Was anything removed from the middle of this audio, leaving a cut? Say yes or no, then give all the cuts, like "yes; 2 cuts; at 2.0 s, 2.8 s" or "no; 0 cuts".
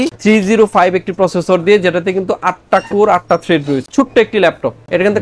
yes; 1 cut; at 3.8 s